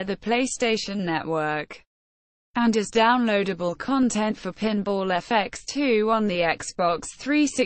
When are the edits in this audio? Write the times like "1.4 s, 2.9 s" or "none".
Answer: none